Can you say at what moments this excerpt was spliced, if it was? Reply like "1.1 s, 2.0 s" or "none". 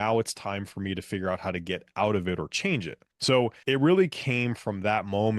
3.0 s